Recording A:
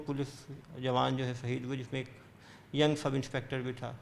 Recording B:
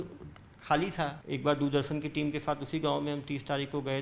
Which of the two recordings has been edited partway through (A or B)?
B